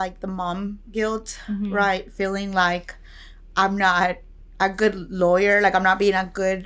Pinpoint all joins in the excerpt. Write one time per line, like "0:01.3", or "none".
none